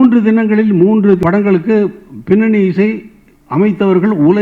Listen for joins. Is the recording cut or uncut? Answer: cut